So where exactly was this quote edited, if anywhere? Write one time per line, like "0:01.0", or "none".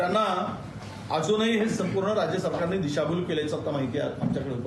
none